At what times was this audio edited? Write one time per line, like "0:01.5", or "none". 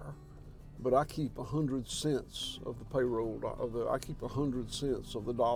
none